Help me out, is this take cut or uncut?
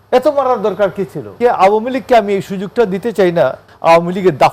cut